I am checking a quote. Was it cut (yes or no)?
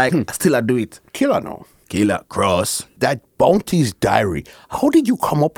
yes